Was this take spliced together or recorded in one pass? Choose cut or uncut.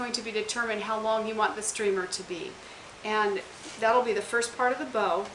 uncut